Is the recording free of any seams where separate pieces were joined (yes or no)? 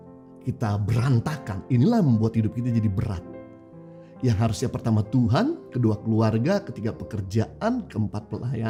yes